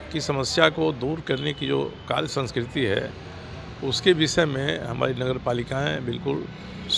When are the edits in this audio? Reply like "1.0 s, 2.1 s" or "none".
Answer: none